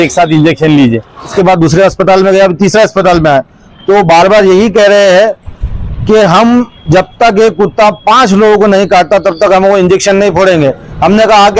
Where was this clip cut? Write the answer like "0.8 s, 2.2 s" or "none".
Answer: 1.3 s